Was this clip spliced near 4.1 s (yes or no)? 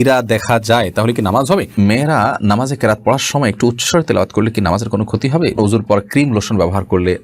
no